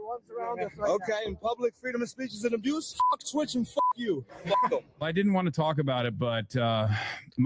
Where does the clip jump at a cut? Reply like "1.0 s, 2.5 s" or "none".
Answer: 2.9 s, 5.0 s